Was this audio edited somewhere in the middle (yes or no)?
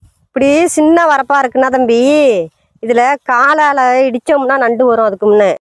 no